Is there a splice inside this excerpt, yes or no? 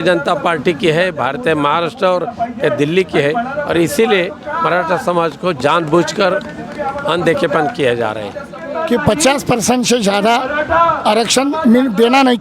yes